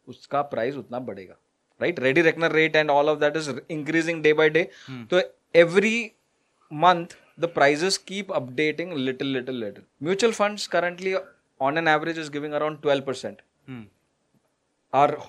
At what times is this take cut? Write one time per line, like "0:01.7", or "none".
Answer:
0:09.9